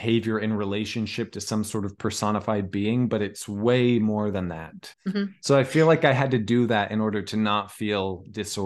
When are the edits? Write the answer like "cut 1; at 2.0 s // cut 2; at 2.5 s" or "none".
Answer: cut 1; at 4.8 s